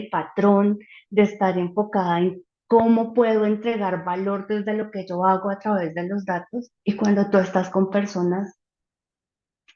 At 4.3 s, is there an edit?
no; 1 cut; at 6.7 s

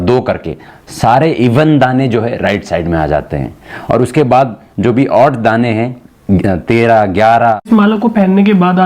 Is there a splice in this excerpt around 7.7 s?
yes; 1 cut; at 7.7 s

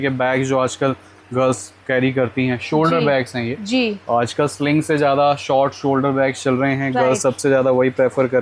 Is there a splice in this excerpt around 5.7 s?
no; 0 cuts

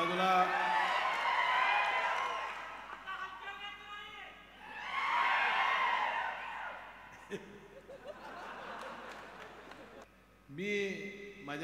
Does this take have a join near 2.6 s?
no; 1 cut; at 10.0 s

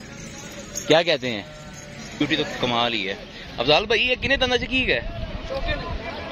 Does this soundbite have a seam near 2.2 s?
yes; 1 cut; at 2.2 s

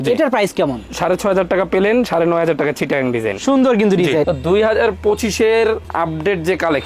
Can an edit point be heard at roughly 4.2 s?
yes; 1 cut; at 4.2 s

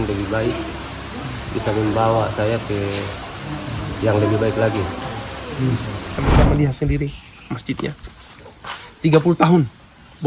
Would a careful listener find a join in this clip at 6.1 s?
yes; 1 cut; at 6.1 s

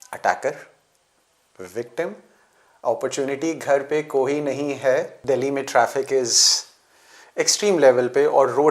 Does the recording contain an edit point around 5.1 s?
yes; 1 cut; at 5.1 s

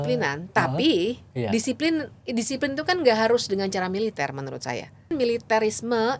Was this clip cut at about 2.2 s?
no; 1 cut; at 5.1 s

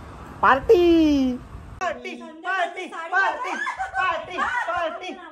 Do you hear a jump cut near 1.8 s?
yes; 1 cut; at 1.8 s

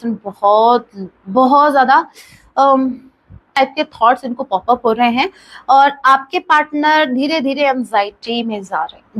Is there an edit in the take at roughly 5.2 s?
no; 1 cut; at 3.6 s

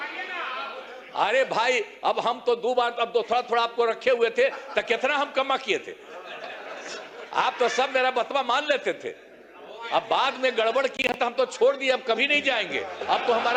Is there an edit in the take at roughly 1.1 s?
no; 0 cuts

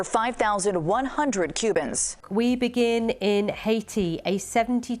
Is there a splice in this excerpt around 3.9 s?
no; 1 cut; at 2.2 s

